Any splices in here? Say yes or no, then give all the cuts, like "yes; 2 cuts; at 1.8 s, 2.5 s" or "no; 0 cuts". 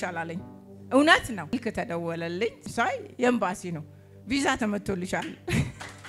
yes; 2 cuts; at 1.5 s, 2.7 s